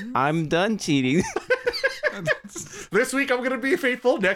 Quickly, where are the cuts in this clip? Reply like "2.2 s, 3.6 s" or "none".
none